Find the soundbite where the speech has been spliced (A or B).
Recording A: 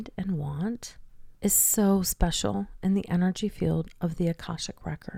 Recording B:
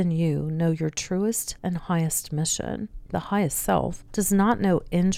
B